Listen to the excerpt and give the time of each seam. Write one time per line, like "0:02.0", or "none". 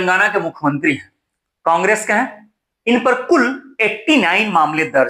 none